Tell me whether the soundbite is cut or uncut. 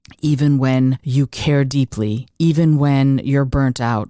cut